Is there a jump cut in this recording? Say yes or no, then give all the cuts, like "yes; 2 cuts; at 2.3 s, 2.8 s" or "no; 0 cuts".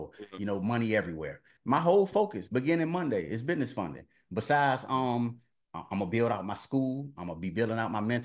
yes; 1 cut; at 1.5 s